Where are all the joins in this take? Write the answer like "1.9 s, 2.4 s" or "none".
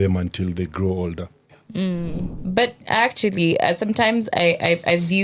2.3 s